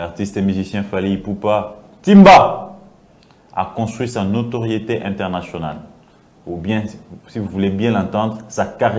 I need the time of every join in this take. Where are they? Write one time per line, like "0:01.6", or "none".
none